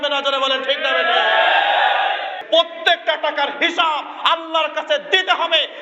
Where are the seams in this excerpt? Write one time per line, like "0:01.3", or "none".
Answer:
0:02.4